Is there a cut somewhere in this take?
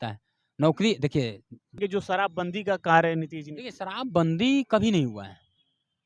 yes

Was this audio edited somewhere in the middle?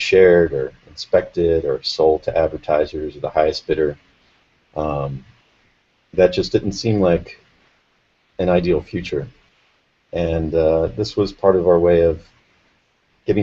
yes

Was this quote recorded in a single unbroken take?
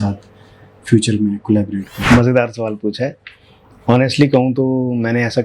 no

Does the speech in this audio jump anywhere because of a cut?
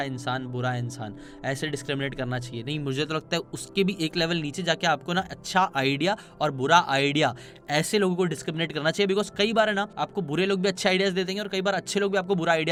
no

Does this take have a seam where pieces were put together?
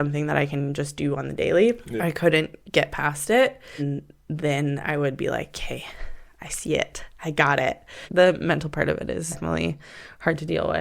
yes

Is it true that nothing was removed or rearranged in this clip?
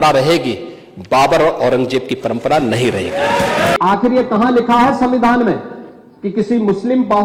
yes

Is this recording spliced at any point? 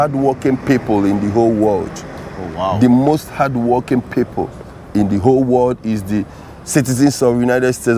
no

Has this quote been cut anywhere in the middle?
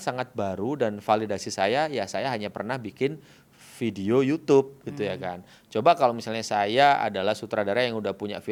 no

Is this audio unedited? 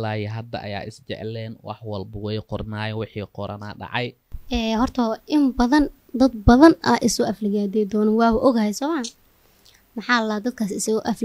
no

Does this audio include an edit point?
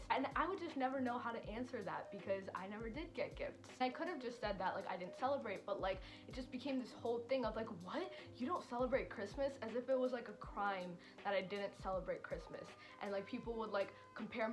no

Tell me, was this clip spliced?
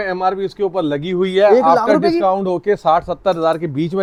no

